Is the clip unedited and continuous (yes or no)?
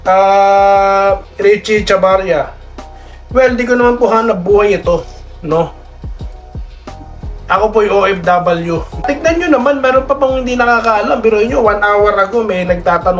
no